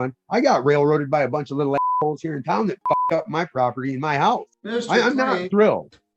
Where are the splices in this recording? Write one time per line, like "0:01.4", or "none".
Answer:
0:04.6